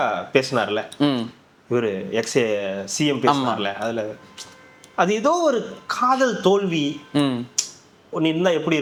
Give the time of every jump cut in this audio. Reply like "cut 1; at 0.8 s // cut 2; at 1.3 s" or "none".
none